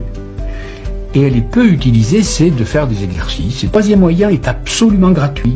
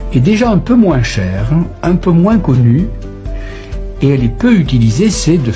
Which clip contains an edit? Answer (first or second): first